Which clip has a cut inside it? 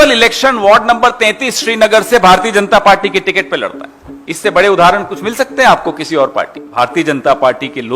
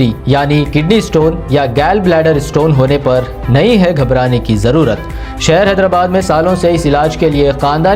first; 1 cut; at 6.7 s

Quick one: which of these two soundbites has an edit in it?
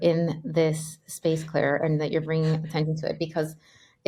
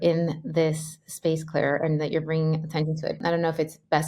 second; 1 cut; at 3.2 s

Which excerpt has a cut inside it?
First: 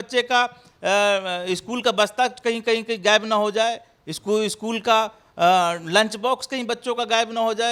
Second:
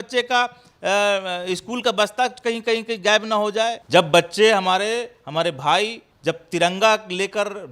second; 2 cuts; at 3.8 s, 6.1 s

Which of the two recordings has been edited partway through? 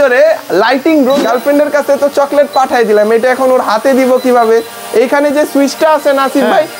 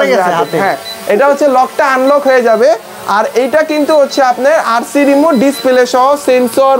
first; 1 cut; at 1.2 s

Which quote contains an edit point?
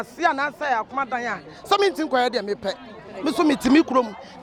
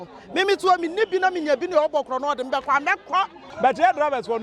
second; 1 cut; at 3.4 s

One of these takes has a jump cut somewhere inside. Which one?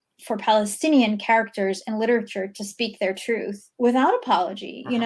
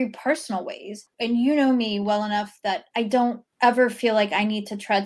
second; 2 cuts; at 1.1 s, 3.1 s

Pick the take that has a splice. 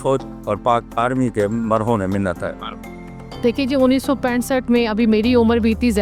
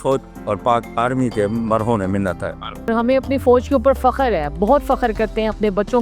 second; 1 cut; at 2.9 s

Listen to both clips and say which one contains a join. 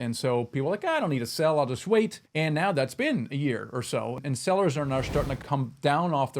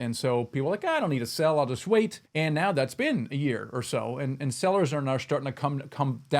first; 2 cuts; at 4.2 s, 5.4 s

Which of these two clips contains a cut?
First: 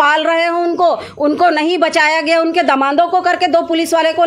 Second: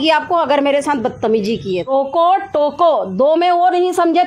second; 1 cut; at 1.9 s

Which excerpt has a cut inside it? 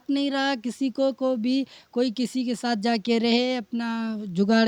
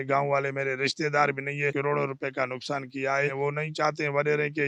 second; 2 cuts; at 1.7 s, 3.3 s

